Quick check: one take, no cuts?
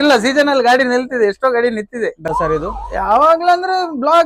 no; 1 cut; at 2.3 s

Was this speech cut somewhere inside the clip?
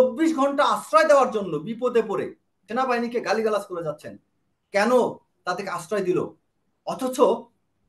yes; 1 cut; at 2.6 s

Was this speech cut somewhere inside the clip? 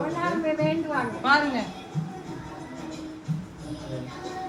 no; 0 cuts

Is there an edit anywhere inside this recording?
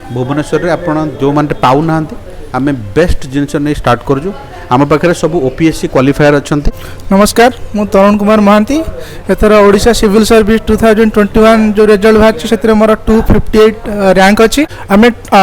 no; 0 cuts

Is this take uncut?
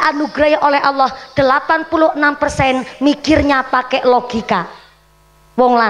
yes; 0 cuts

